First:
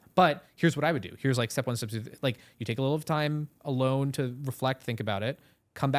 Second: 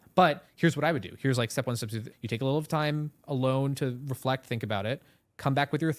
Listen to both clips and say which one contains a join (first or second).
second